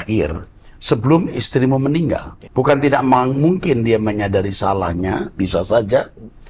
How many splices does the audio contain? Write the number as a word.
one